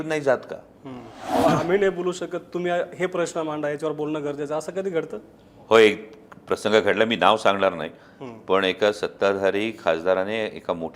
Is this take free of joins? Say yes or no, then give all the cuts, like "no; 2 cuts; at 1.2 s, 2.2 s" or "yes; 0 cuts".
no; 1 cut; at 1.4 s